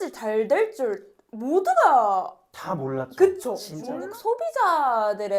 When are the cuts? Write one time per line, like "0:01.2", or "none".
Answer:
0:03.7